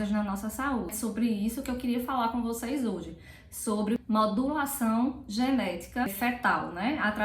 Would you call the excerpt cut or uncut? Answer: cut